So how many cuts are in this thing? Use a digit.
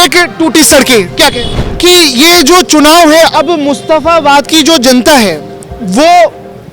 1